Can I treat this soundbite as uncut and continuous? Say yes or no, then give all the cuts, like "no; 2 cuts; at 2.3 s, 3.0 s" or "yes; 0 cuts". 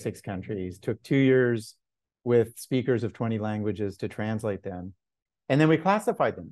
yes; 0 cuts